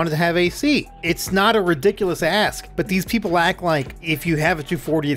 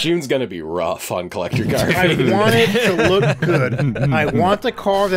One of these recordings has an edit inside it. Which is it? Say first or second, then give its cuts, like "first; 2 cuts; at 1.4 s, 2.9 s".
first; 3 cuts; at 0.9 s, 2.6 s, 4.0 s